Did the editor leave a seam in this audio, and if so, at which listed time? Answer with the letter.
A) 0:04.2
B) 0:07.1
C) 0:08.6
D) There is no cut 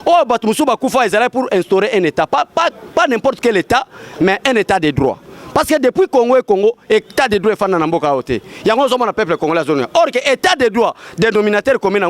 D